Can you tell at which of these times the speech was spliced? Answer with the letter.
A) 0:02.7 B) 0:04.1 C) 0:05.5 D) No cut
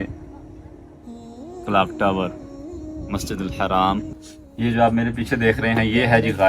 B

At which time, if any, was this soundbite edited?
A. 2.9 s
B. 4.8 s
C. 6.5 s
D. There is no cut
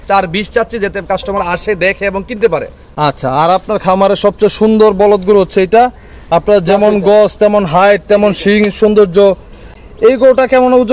D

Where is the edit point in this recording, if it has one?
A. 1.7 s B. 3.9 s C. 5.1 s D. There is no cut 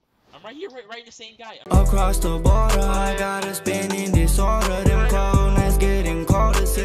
A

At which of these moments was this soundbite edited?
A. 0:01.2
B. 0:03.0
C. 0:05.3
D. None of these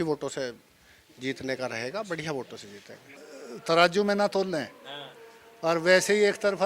B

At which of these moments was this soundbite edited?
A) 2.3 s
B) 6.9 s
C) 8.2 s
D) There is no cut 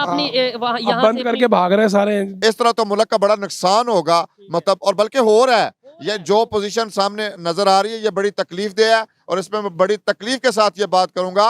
A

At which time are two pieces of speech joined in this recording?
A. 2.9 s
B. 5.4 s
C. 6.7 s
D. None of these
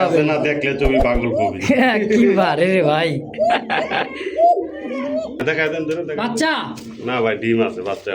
B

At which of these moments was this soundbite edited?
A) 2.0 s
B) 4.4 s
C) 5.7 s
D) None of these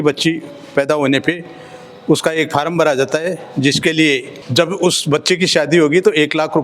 B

